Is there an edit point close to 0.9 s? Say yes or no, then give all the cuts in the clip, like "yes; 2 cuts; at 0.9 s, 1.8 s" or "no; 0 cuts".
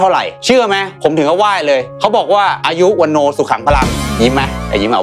yes; 2 cuts; at 0.9 s, 4.0 s